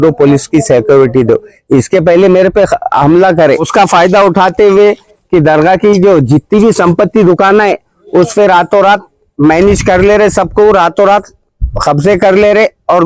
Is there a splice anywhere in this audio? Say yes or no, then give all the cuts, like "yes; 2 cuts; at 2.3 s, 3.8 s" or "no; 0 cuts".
yes; 1 cut; at 3.7 s